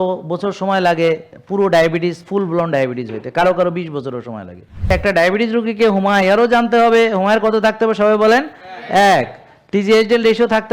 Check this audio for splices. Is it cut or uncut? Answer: cut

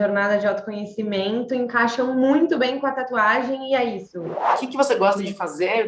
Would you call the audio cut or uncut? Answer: cut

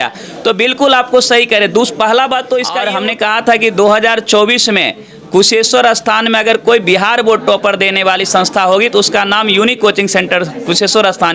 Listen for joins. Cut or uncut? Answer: cut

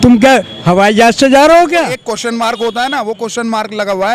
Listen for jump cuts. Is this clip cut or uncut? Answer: cut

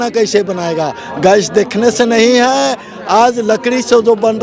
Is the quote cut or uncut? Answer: uncut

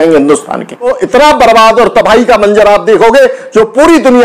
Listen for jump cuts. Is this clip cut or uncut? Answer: cut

